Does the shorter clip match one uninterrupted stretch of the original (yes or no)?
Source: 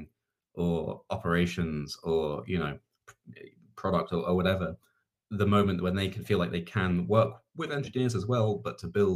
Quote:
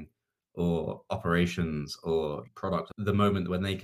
no